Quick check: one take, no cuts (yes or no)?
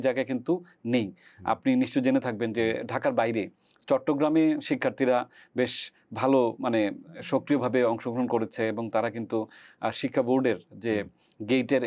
yes